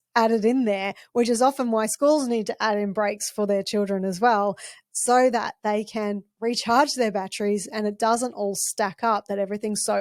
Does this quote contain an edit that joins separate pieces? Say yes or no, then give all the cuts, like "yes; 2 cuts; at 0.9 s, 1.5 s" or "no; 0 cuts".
no; 0 cuts